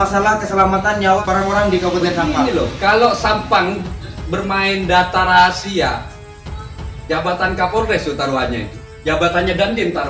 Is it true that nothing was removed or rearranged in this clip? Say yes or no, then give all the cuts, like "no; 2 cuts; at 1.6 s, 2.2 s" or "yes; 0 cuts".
no; 1 cut; at 1.2 s